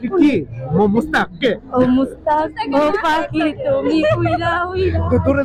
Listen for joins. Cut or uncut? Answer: uncut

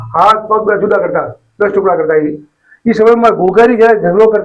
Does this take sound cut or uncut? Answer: uncut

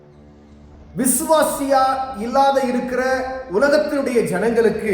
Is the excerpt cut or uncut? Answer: cut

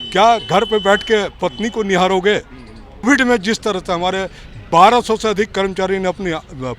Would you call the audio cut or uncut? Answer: cut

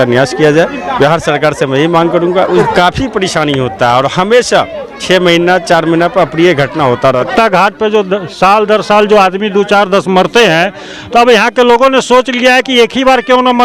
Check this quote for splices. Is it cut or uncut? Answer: cut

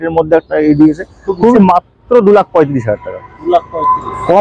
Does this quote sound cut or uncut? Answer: cut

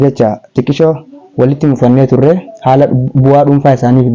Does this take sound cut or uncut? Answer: uncut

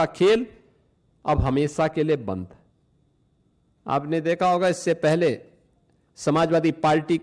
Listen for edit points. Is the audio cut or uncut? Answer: uncut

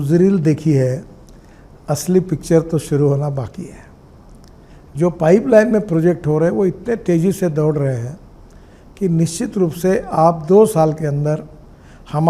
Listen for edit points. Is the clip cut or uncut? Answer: uncut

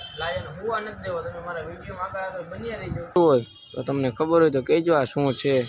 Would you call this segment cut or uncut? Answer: cut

